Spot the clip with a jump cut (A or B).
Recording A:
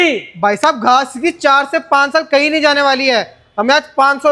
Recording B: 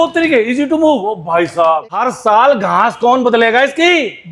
B